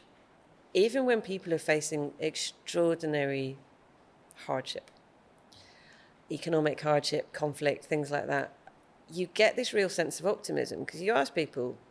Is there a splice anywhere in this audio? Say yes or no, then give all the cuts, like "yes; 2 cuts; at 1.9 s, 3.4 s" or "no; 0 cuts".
no; 0 cuts